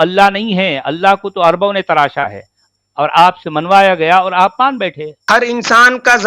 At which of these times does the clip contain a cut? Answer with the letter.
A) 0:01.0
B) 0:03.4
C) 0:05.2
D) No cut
C